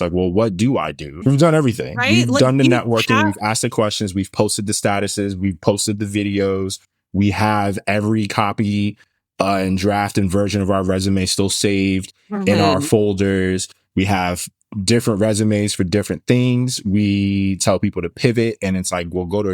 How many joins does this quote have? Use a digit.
1